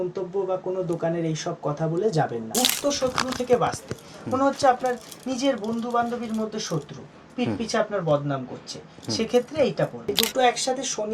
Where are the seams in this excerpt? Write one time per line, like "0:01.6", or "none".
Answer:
0:02.4
0:10.1